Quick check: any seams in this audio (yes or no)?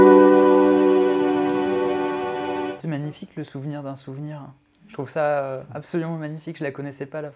yes